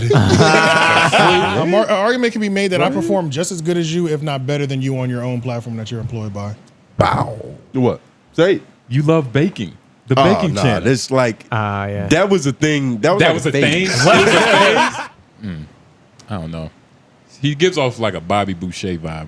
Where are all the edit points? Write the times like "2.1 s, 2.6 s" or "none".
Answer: 1.5 s, 7.5 s, 15.0 s